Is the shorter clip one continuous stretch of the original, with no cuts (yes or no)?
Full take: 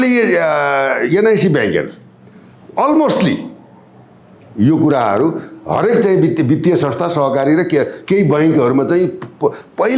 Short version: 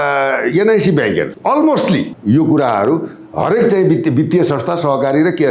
no